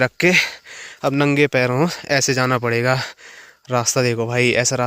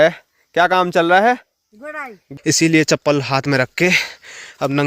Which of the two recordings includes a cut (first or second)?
second